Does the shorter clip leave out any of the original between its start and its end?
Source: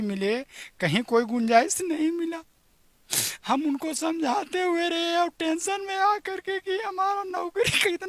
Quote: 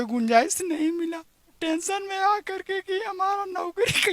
yes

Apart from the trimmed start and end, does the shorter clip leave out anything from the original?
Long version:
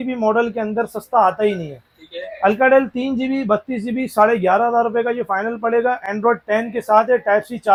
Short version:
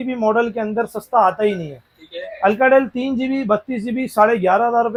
no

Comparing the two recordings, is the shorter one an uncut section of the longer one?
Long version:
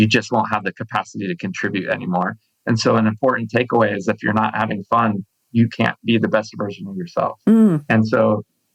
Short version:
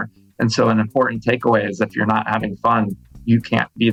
yes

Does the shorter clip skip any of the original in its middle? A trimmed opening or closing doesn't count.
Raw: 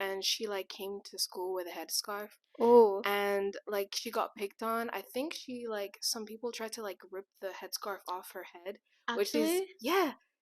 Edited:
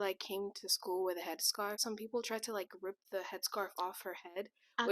yes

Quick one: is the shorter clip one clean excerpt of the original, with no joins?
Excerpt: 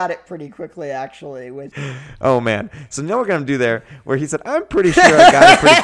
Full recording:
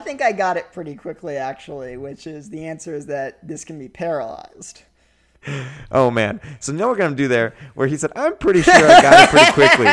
no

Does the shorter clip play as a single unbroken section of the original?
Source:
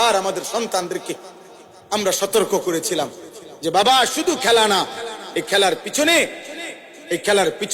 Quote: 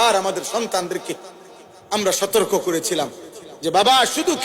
yes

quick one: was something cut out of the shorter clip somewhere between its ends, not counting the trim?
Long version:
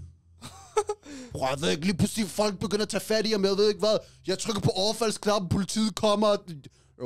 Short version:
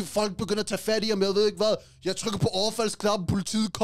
no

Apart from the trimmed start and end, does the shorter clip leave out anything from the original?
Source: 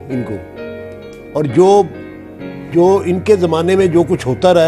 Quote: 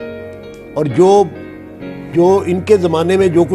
no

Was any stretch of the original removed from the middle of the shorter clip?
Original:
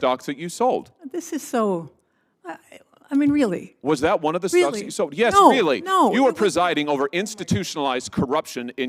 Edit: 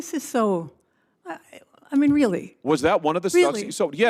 no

